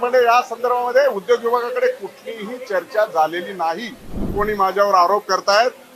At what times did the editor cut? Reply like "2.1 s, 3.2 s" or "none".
4.3 s